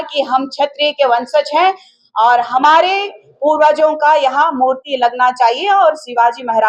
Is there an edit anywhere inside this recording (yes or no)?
no